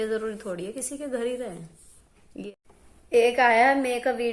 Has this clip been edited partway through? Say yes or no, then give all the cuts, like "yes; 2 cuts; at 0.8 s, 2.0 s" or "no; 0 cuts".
yes; 1 cut; at 2.5 s